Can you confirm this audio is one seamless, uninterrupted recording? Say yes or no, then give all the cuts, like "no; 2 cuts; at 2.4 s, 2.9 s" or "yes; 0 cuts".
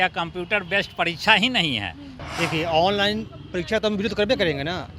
no; 1 cut; at 2.1 s